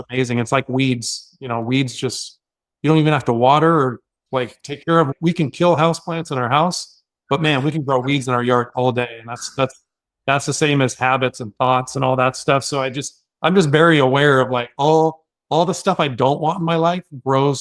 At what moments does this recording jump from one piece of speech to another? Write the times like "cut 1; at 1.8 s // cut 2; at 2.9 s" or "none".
cut 1; at 5.1 s

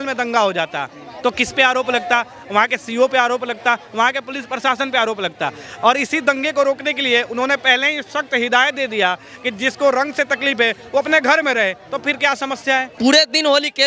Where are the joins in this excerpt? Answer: cut 1; at 12.9 s

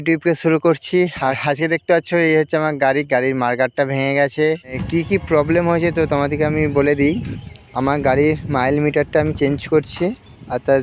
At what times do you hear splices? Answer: cut 1; at 1.4 s // cut 2; at 4.8 s

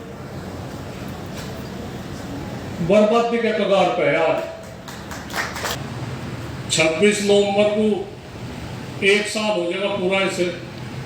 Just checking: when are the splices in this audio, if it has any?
cut 1; at 5.8 s

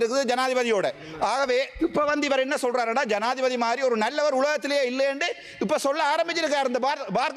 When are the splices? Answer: none

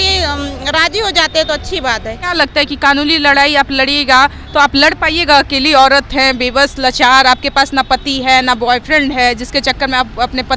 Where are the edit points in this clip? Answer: cut 1; at 2.3 s

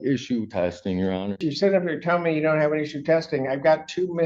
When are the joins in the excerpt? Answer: cut 1; at 1.5 s

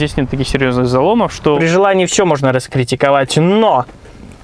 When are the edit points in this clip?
cut 1; at 1.6 s

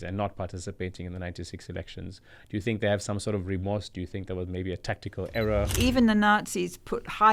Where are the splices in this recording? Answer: cut 1; at 5.7 s

